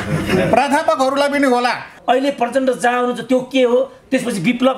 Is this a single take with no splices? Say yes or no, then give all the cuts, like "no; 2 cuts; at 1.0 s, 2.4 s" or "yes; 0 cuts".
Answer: no; 1 cut; at 1.9 s